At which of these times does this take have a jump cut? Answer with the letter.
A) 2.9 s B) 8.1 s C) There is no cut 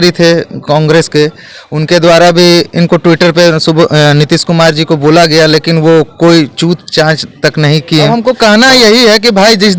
B